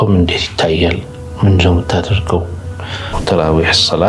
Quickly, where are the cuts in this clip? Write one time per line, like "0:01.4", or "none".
0:03.2